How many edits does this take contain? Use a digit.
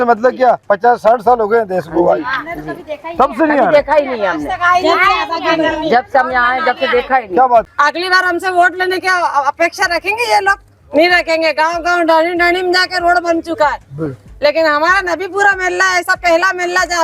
1